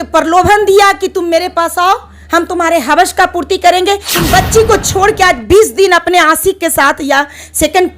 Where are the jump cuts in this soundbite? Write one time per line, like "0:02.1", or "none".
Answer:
0:04.1